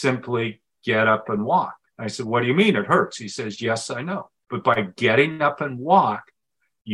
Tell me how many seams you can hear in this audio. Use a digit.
0